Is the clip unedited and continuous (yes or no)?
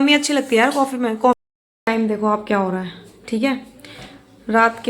no